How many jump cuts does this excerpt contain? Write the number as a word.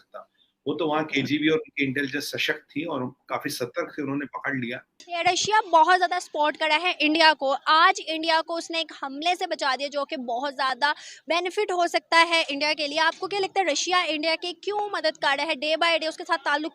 one